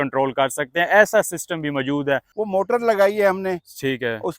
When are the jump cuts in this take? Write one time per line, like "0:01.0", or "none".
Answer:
0:02.4